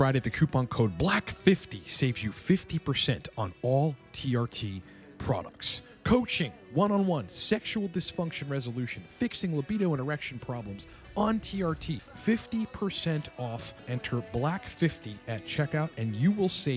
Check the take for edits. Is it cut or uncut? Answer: cut